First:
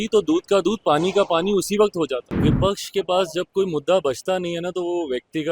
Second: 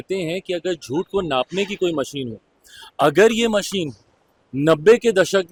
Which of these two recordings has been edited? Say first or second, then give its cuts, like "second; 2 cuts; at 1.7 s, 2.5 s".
first; 1 cut; at 2.3 s